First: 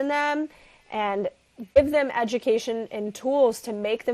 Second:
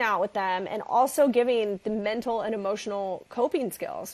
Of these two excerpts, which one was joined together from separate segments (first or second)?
first